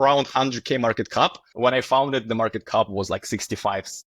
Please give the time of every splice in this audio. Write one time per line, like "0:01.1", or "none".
0:01.4